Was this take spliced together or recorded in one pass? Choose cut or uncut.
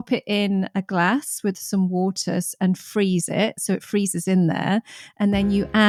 uncut